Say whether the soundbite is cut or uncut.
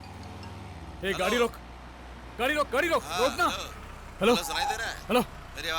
uncut